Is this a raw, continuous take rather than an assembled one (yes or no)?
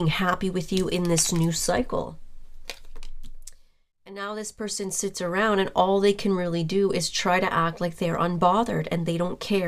no